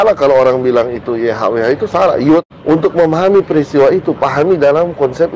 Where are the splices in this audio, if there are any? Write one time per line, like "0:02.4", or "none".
0:02.5